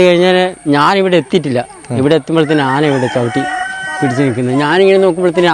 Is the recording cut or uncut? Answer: uncut